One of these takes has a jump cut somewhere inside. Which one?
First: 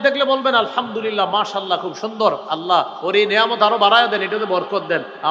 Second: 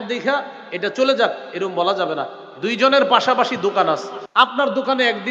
second; 1 cut; at 4.2 s

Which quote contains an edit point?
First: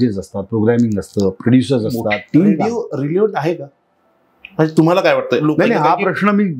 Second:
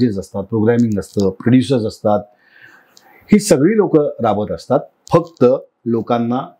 first; 2 cuts; at 2.6 s, 5.4 s

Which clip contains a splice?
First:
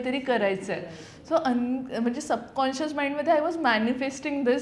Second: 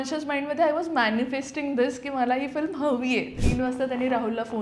second; 1 cut; at 3.4 s

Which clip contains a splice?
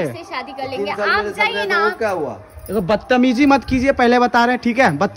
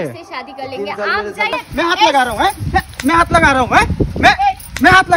second; 1 cut; at 1.6 s

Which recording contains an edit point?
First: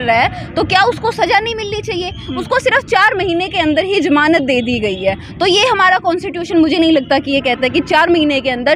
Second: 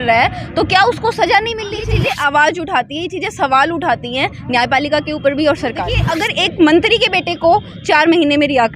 second; 2 cuts; at 2.0 s, 6.1 s

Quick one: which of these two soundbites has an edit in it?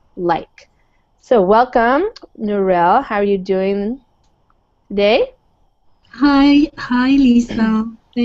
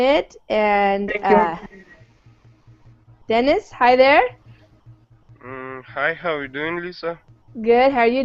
first; 1 cut; at 3.4 s

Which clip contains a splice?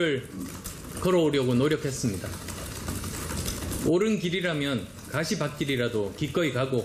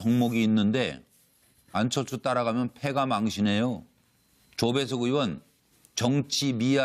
second; 1 cut; at 5.1 s

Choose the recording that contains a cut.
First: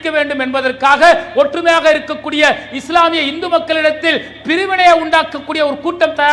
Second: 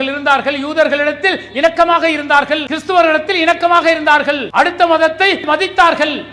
second; 3 cuts; at 2.7 s, 4.5 s, 5.4 s

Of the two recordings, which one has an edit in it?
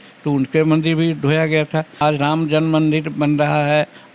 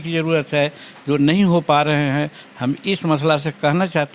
first; 1 cut; at 2.0 s

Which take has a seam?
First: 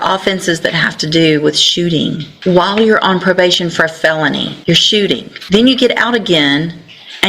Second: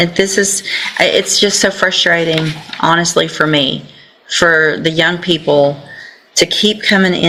first; 3 cuts; at 2.3 s, 4.5 s, 5.3 s

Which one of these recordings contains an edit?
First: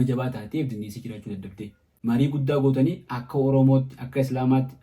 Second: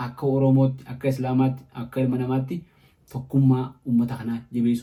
first; 1 cut; at 1.9 s

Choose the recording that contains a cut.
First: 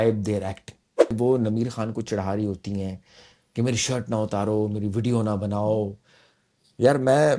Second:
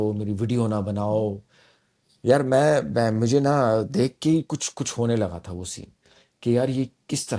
first; 1 cut; at 1.2 s

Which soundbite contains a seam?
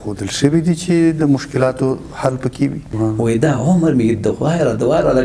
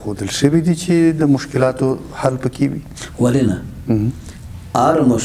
first; 1 cut; at 2.8 s

